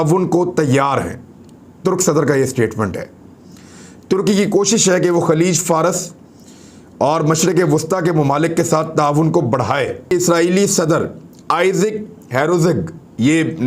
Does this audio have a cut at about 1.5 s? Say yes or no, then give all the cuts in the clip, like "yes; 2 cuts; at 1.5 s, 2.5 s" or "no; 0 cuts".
no; 1 cut; at 10.1 s